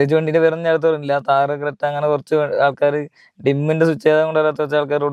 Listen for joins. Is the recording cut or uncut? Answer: uncut